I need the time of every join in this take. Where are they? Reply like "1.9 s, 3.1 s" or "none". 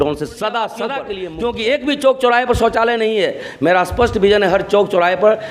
1.0 s